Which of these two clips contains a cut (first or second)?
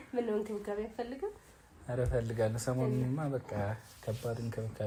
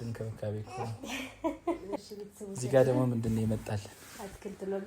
second